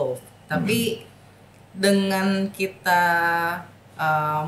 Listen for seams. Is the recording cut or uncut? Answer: uncut